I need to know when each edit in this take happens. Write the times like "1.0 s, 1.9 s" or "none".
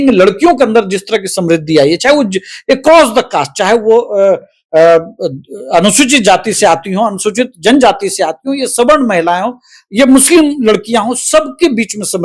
none